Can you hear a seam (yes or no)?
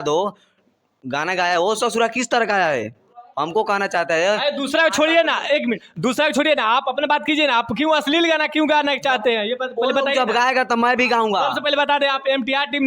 no